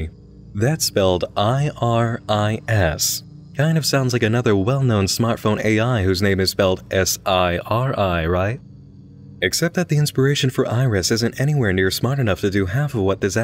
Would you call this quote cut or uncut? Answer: cut